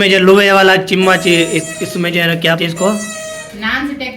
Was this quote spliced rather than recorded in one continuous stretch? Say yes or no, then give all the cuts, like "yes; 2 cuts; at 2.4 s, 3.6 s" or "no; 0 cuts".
yes; 1 cut; at 2.6 s